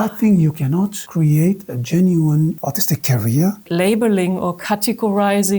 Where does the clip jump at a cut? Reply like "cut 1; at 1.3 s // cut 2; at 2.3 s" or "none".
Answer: cut 1; at 1.0 s // cut 2; at 2.6 s // cut 3; at 3.6 s